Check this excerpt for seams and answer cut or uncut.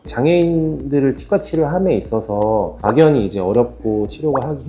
uncut